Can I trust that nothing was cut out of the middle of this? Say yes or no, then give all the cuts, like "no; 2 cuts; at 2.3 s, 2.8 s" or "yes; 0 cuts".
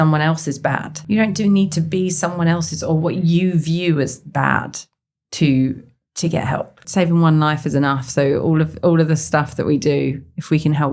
no; 2 cuts; at 0.9 s, 6.8 s